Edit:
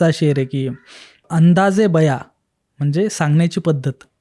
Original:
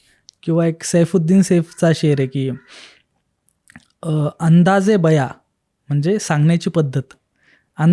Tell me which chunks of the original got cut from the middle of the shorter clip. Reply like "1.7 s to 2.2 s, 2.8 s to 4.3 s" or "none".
3.1 s to 4.3 s